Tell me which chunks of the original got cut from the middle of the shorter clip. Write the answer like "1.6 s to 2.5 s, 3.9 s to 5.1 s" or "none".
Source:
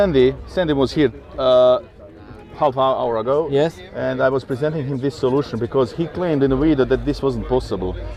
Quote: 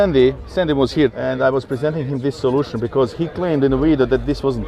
1.2 s to 4.0 s